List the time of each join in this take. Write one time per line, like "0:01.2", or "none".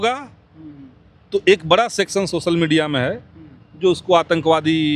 none